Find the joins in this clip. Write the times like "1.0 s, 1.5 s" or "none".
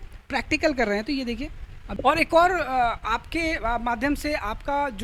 none